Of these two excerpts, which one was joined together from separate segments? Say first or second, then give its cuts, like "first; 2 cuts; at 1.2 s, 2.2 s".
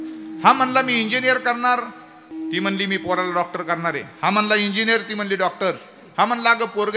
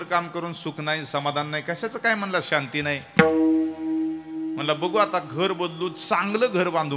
first; 1 cut; at 2.3 s